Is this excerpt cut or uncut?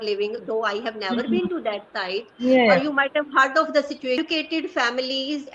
cut